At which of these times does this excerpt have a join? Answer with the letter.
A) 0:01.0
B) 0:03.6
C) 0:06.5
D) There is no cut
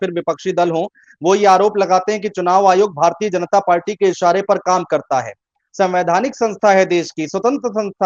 D